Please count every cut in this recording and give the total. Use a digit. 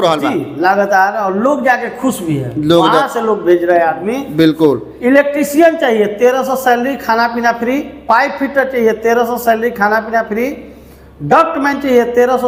0